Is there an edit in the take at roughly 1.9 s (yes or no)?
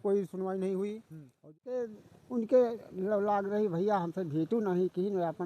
yes